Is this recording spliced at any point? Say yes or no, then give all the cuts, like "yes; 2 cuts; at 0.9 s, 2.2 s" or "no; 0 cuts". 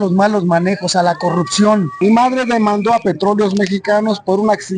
yes; 1 cut; at 1.9 s